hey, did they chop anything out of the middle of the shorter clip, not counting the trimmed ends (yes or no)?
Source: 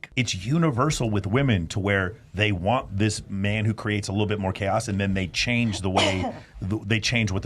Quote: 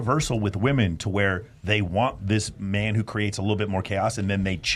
no